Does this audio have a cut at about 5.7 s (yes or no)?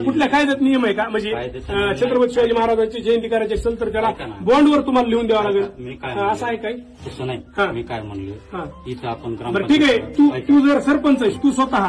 no